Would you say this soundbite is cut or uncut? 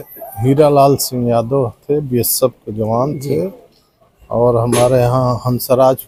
uncut